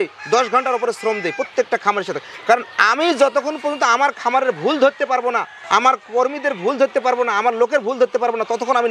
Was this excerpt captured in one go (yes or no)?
yes